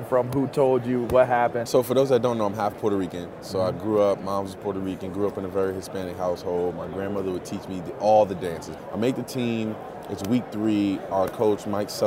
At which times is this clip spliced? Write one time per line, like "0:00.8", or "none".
0:01.6
0:08.7